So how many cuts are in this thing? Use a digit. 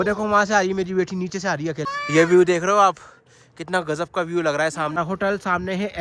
2